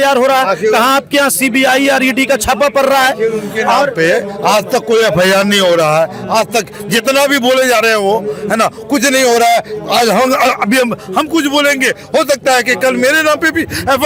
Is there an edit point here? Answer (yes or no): no